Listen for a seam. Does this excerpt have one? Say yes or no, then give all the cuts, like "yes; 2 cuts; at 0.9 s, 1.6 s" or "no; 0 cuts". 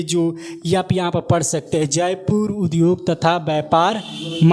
no; 0 cuts